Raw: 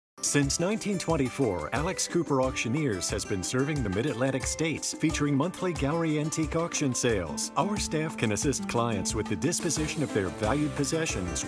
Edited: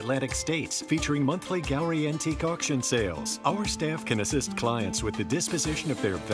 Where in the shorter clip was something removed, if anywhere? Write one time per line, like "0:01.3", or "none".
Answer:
none

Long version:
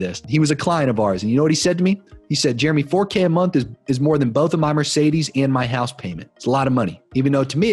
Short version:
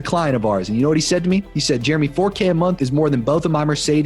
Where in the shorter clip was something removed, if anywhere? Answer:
0:01.5
0:02.7

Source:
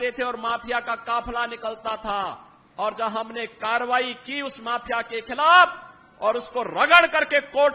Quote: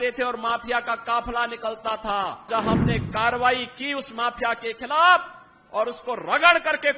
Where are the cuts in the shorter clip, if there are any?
0:02.5

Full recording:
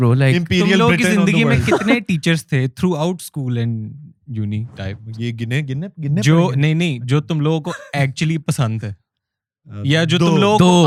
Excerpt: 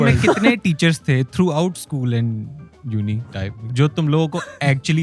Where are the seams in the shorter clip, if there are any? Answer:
0:03.7

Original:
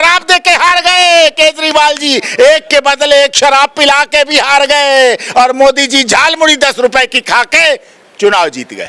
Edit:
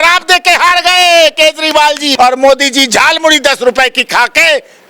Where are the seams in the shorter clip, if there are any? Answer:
0:02.1

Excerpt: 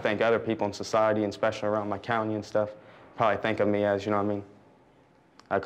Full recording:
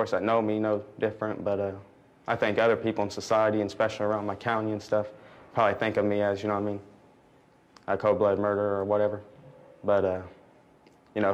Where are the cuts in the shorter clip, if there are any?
none

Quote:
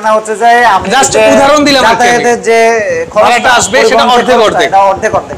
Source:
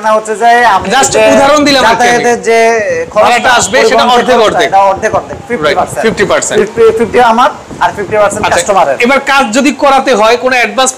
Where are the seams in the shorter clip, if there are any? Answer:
none

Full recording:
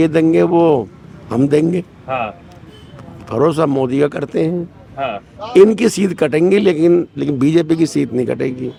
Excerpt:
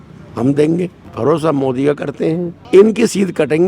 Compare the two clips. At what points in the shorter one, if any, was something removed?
0:01.0
0:02.5

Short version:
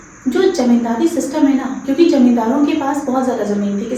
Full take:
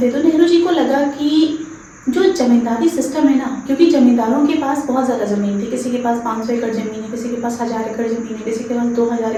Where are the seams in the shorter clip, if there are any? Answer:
none

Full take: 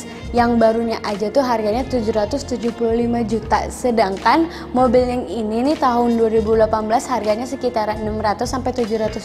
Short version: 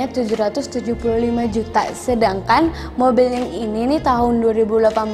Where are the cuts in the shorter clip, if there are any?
none

